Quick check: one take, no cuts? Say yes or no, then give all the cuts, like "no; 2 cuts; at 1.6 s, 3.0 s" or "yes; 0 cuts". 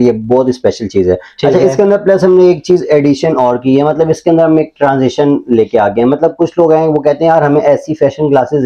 yes; 0 cuts